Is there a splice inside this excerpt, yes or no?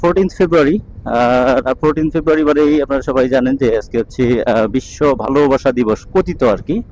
no